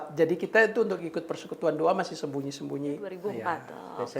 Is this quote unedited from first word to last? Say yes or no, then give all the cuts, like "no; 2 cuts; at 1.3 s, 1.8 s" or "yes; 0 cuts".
no; 1 cut; at 3.2 s